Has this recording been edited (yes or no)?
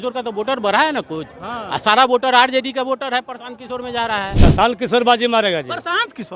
yes